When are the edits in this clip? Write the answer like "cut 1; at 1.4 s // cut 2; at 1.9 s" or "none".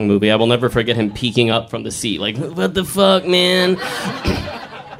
cut 1; at 4.1 s